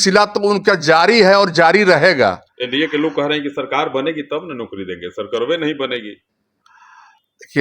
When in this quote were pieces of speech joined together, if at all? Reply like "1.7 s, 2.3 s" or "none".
none